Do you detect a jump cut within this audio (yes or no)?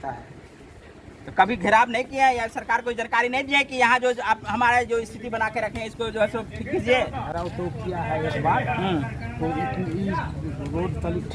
no